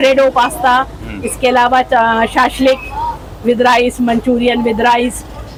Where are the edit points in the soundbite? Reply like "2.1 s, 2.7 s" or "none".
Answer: none